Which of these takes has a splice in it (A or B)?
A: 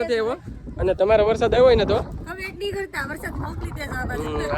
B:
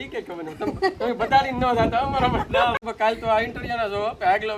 B